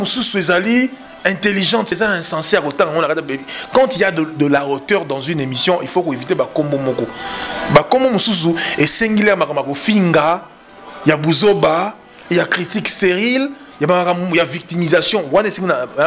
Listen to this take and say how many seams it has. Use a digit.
1